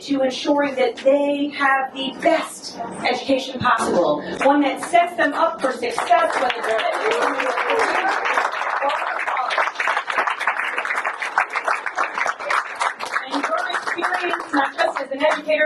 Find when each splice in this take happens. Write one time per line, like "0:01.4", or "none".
none